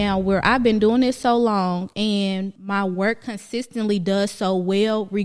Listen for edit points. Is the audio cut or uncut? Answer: cut